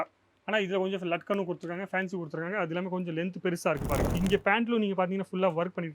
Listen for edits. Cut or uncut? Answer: cut